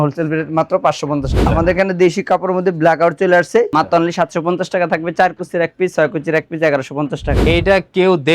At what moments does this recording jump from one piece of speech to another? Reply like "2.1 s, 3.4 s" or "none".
1.5 s, 3.7 s, 7.4 s